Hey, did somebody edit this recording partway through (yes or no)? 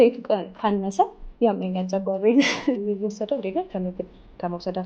yes